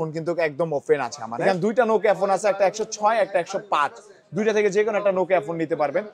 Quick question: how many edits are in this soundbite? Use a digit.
1